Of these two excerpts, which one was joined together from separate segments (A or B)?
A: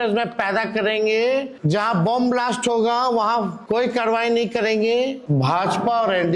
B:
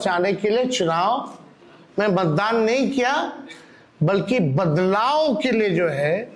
A